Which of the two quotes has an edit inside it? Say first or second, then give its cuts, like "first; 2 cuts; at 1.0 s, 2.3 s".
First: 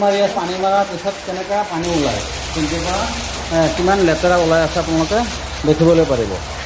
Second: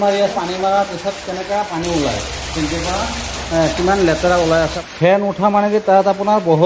second; 1 cut; at 4.8 s